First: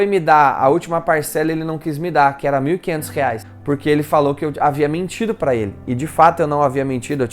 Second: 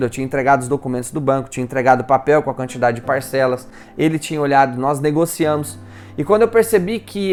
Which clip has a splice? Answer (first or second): first